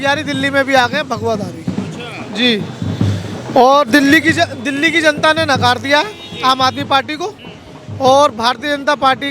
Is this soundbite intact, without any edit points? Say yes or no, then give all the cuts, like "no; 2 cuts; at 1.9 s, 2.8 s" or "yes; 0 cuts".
yes; 0 cuts